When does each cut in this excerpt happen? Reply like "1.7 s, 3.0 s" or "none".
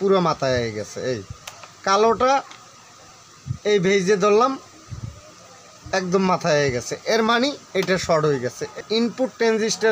8.6 s